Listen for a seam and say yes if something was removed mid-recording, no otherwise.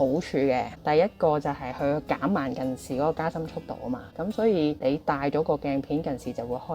no